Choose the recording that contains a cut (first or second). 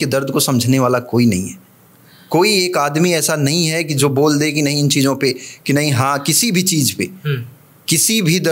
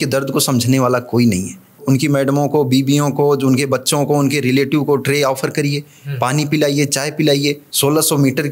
second